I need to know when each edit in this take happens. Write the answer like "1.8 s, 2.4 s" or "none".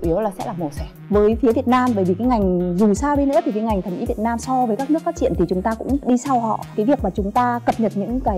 1.0 s